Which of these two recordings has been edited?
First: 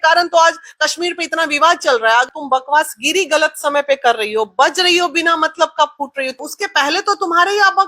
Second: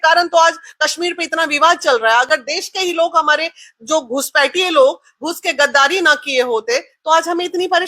first; 2 cuts; at 2.3 s, 6.4 s

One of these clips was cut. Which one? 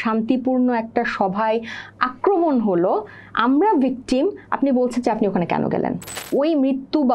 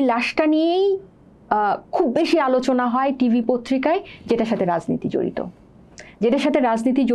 first; 1 cut; at 6.1 s

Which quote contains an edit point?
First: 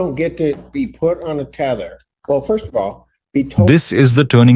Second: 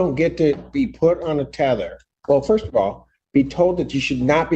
second; 1 cut; at 3.6 s

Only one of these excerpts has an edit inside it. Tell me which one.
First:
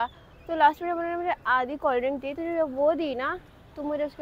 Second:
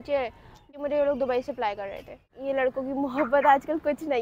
second; 2 cuts; at 0.8 s, 2.3 s

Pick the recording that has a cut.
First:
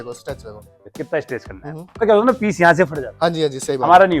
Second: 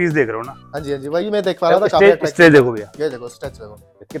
first; 1 cut; at 2.0 s

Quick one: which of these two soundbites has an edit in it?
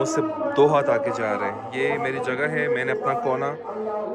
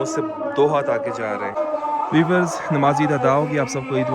second; 1 cut; at 1.6 s

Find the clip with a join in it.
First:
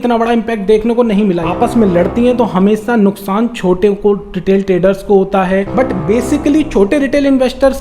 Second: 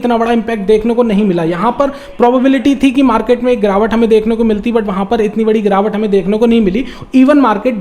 first; 2 cuts; at 1.5 s, 5.7 s

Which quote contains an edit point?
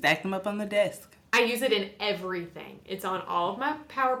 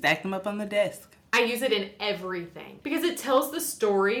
second; 1 cut; at 2.7 s

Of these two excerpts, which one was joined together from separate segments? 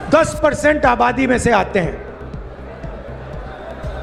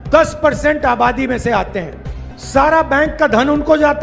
second; 1 cut; at 2.3 s

